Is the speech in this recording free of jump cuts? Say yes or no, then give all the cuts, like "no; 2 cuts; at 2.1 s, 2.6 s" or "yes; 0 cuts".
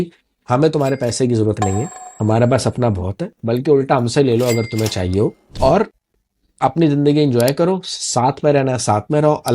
no; 1 cut; at 5.5 s